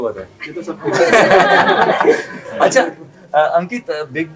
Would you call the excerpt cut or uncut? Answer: uncut